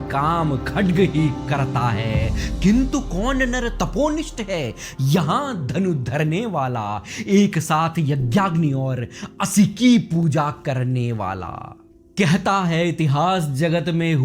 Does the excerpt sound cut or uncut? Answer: uncut